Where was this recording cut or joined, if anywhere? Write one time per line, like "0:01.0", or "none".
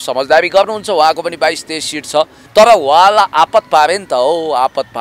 0:02.4

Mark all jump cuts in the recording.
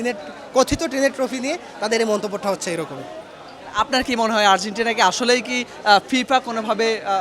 none

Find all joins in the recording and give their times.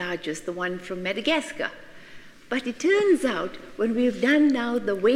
none

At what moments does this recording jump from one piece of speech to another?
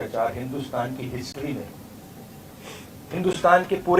none

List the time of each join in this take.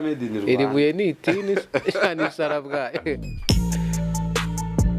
0:03.4

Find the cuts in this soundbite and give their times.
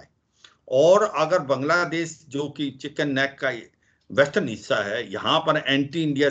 none

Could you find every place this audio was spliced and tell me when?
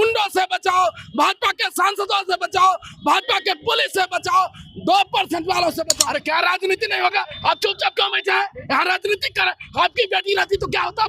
0:05.9

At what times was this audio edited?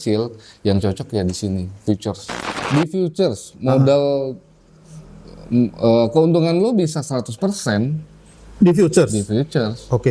0:02.4

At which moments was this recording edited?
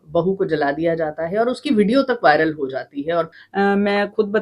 0:03.4

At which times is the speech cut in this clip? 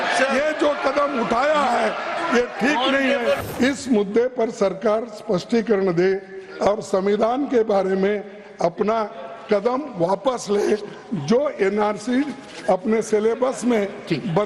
0:03.4

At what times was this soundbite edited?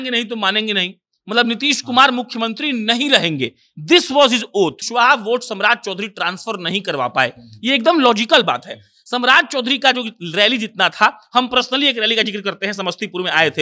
0:04.8

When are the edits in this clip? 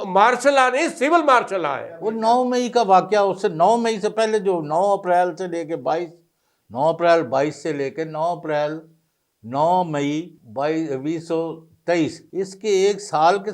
0:02.1
0:10.4
0:12.2

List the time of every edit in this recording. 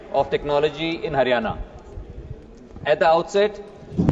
none

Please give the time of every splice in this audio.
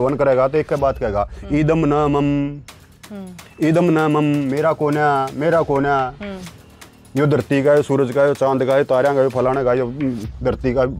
none

